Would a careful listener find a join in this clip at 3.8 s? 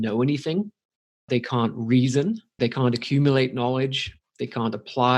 no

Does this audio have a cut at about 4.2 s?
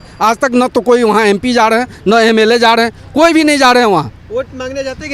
no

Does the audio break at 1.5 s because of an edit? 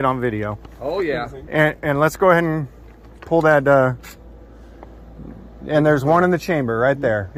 no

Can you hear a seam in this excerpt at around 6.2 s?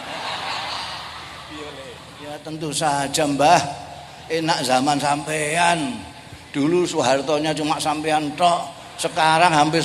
no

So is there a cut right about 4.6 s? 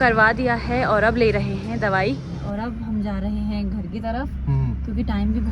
no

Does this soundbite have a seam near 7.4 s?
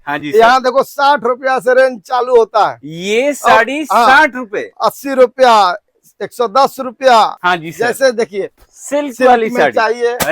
yes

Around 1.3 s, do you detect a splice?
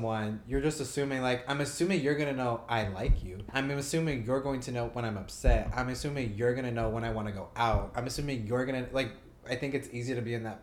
no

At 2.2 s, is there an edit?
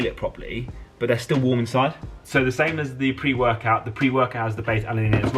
yes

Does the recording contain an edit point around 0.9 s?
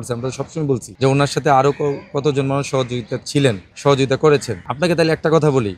yes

